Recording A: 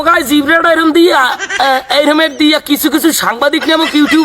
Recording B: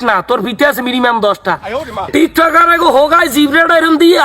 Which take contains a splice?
B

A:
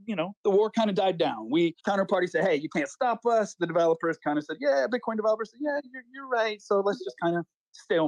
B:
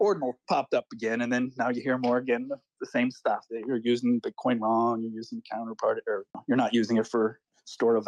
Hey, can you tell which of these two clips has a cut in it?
A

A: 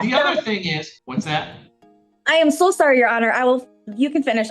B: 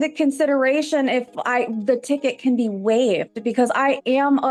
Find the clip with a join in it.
A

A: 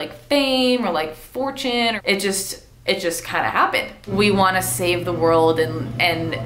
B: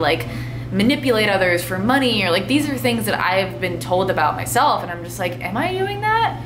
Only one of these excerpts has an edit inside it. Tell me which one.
A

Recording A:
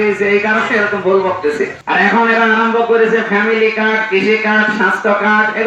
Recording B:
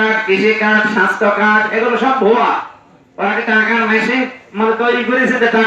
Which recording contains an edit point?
A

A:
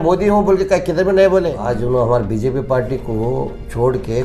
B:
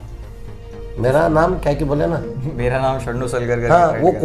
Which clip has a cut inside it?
A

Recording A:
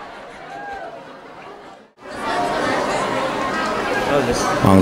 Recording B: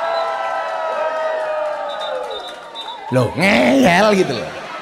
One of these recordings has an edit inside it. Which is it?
A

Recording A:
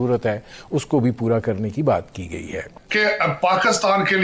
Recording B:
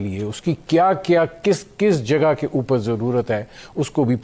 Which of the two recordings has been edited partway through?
A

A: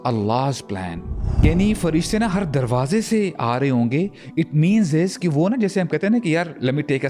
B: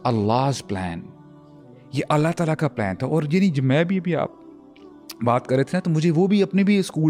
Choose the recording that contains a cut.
A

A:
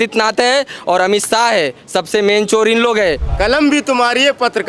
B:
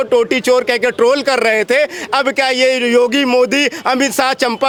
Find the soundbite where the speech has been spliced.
A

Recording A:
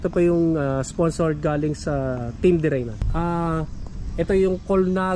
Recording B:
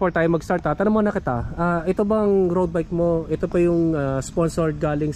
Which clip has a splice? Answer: A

